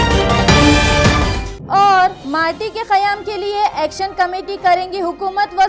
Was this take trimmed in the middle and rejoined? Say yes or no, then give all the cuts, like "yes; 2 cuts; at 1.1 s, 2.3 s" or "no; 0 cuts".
yes; 1 cut; at 1.0 s